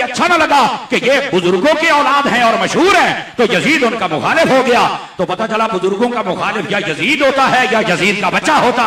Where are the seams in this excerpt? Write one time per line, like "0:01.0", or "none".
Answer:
none